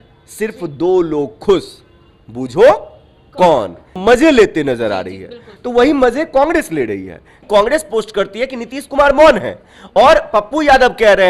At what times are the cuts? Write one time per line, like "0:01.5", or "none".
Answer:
0:03.9
0:07.4